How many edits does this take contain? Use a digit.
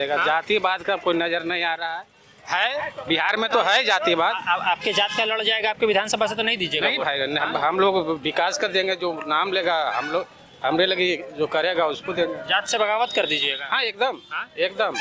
0